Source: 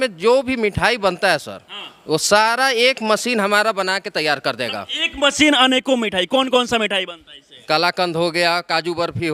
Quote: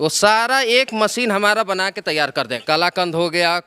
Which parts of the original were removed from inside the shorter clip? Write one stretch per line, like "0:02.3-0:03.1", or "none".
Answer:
0:04.6-0:07.6